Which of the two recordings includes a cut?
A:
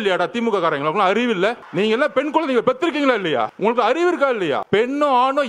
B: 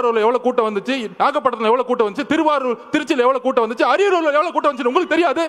A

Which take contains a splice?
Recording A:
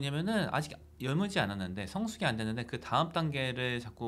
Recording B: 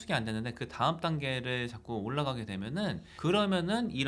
B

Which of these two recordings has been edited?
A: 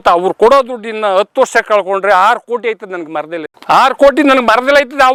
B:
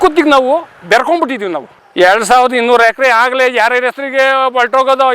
B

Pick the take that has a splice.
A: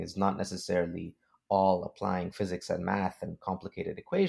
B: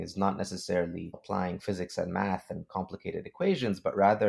B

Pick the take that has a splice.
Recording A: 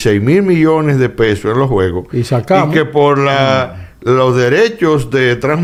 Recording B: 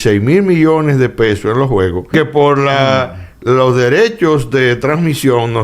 B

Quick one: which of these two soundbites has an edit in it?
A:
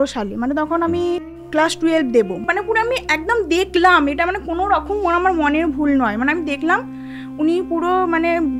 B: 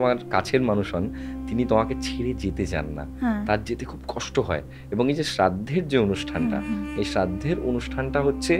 A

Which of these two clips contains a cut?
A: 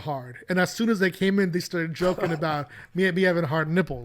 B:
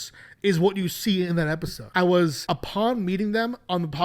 B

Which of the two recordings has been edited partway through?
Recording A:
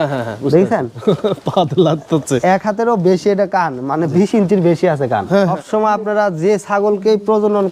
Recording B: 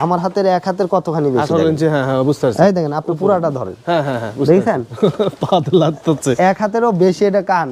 A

